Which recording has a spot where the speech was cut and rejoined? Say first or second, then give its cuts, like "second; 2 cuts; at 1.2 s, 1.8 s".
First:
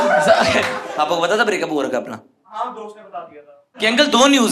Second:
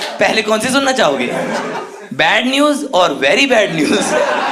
first; 2 cuts; at 0.9 s, 3.7 s